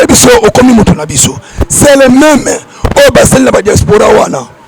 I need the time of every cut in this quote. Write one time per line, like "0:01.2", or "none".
none

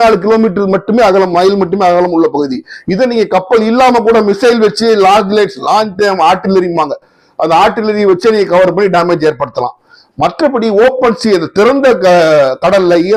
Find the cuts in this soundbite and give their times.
none

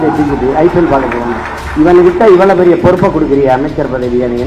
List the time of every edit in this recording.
0:01.6

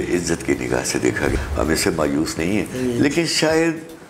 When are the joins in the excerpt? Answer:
0:01.3

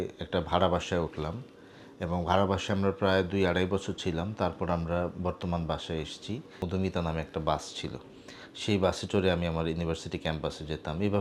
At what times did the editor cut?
0:06.6

